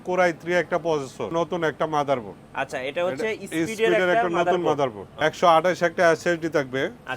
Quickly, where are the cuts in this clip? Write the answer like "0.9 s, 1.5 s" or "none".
1.3 s, 5.1 s